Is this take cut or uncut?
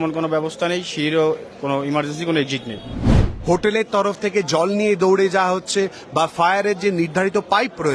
cut